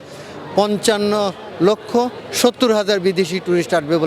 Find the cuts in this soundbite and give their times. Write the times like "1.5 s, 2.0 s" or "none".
none